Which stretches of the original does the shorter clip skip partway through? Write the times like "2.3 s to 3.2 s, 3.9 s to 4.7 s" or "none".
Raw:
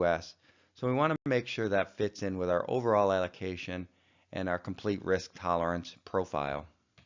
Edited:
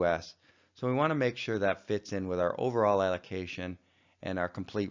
1.2 s to 1.3 s